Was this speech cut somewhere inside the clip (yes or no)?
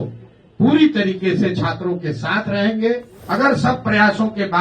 yes